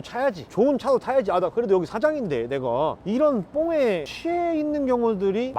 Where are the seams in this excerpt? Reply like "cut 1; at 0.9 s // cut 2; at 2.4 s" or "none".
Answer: none